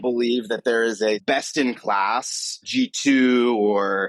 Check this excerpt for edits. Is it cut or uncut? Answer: cut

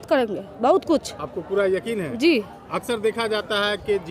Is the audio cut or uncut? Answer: uncut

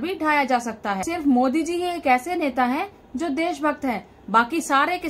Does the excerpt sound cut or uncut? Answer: cut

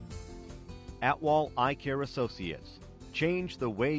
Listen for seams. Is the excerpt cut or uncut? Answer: cut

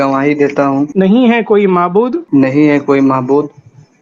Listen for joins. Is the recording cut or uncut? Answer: cut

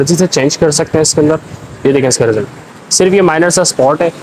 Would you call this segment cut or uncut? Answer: uncut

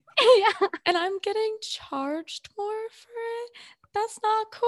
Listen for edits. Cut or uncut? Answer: uncut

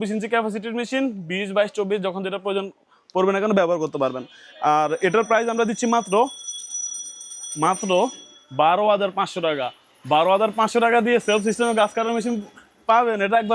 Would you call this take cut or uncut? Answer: uncut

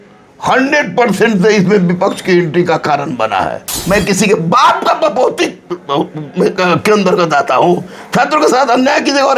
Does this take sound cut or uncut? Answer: cut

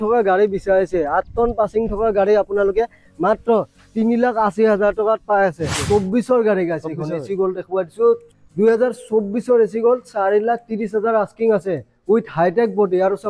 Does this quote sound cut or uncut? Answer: cut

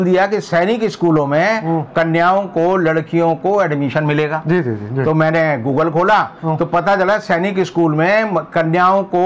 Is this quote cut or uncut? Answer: uncut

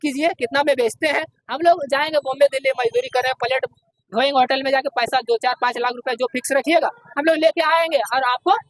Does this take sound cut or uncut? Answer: uncut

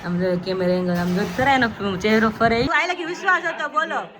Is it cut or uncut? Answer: cut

